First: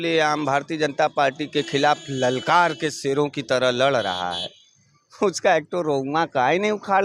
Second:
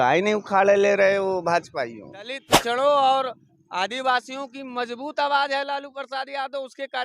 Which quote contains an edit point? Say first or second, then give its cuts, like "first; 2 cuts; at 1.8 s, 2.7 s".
second; 1 cut; at 2.5 s